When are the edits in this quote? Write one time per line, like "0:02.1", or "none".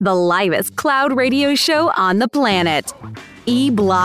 none